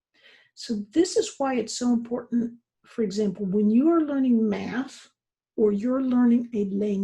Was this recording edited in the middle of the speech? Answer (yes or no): no